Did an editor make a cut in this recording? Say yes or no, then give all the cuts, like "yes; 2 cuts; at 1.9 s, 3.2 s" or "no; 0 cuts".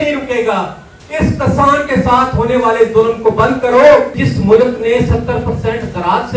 yes; 1 cut; at 4.2 s